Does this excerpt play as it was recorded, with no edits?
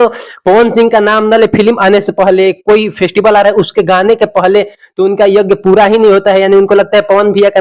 yes; 0 cuts

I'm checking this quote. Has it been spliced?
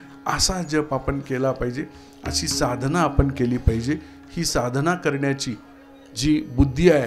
no; 0 cuts

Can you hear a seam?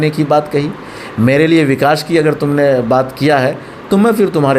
no; 0 cuts

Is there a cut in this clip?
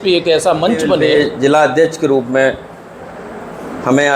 yes; 1 cut; at 1.0 s

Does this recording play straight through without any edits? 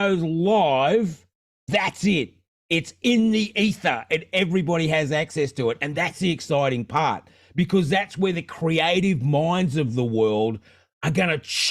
yes; 0 cuts

